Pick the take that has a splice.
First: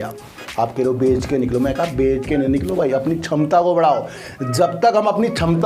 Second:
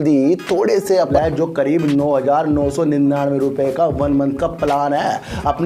second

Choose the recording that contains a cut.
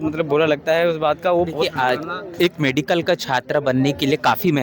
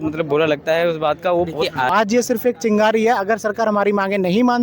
second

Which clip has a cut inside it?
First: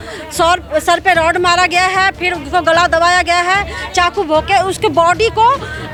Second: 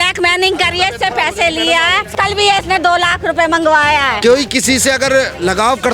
second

